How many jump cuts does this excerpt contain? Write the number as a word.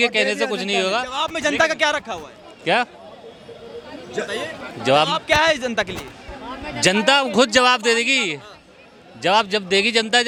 zero